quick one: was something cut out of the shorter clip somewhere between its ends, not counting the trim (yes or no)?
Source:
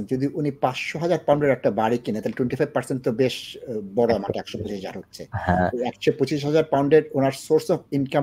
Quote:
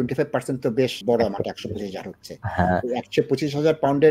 yes